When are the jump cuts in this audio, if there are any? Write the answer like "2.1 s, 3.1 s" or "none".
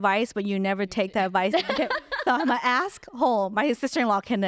none